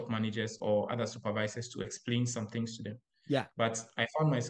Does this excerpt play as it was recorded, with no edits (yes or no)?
yes